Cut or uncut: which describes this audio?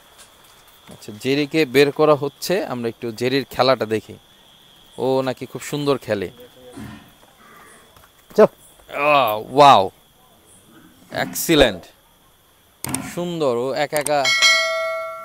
cut